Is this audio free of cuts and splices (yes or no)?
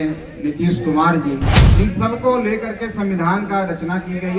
no